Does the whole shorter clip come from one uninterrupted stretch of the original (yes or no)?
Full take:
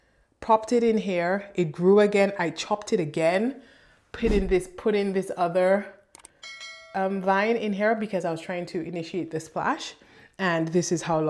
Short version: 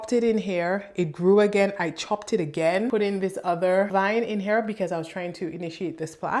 no